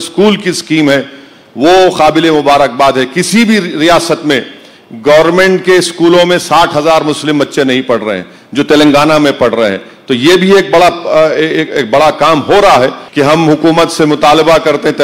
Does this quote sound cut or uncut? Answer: cut